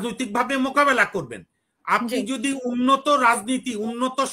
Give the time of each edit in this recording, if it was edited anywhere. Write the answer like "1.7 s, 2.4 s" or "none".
none